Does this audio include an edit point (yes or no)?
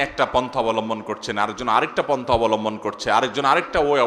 no